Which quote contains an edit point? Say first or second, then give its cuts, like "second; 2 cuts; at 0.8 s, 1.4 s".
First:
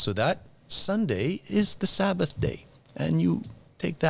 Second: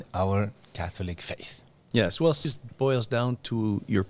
second; 1 cut; at 2.4 s